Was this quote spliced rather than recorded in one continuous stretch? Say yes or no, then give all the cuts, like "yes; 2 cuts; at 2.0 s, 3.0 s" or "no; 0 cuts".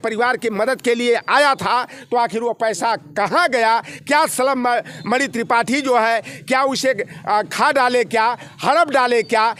no; 0 cuts